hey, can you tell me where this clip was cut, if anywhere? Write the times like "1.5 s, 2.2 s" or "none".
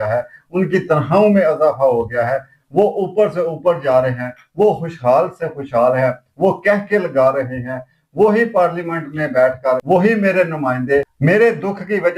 9.8 s, 11.1 s